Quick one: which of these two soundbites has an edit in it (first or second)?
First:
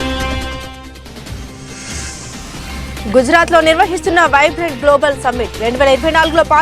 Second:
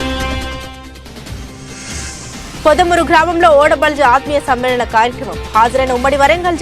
second